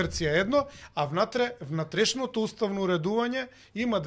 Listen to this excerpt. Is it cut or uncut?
uncut